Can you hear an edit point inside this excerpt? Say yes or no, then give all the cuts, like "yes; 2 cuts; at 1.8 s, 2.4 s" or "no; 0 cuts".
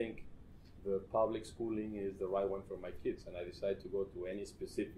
no; 0 cuts